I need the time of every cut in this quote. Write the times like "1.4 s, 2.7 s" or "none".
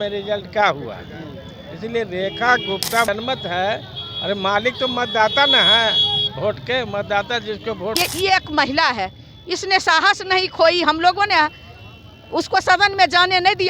3.1 s, 7.9 s